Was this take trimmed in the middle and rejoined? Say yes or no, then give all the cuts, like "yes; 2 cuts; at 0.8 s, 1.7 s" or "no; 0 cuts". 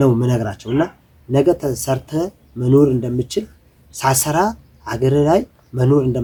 no; 0 cuts